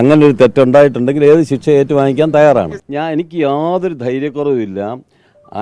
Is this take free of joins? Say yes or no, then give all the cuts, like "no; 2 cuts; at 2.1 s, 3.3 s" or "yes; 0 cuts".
no; 1 cut; at 2.8 s